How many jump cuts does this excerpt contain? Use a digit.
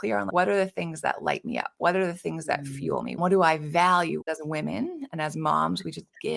2